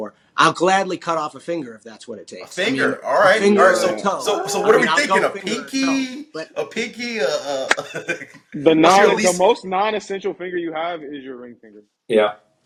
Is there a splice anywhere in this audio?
no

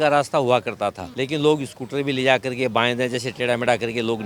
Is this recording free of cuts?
no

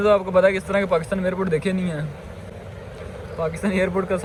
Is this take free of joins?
yes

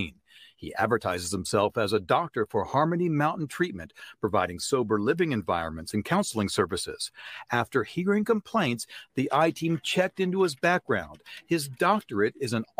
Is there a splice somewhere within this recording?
no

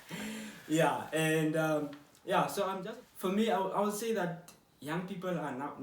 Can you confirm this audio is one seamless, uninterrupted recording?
no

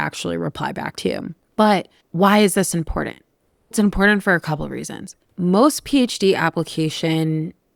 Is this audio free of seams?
yes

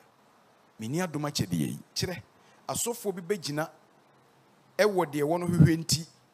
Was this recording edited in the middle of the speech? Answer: yes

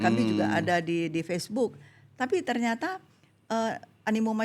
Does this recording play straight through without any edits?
yes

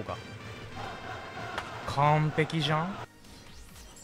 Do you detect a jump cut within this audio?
yes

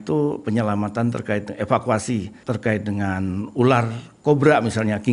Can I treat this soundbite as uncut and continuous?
no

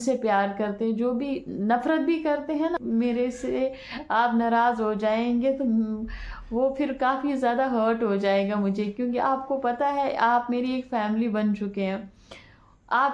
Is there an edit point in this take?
yes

